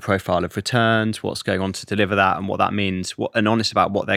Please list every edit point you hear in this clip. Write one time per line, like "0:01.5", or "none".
0:01.4